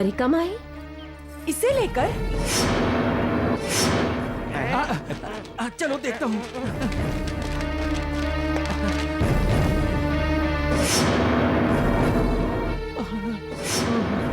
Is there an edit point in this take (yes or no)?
no